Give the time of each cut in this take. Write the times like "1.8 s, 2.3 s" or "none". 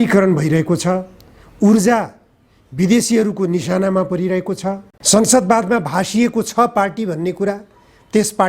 4.9 s